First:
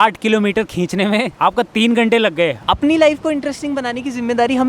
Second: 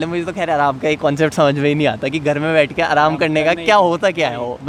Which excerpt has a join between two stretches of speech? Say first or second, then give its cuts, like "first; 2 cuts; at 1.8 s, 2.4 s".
first; 2 cuts; at 1.3 s, 2.6 s